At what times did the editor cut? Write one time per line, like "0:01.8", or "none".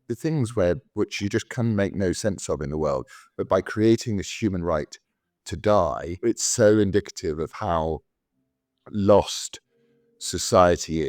0:06.1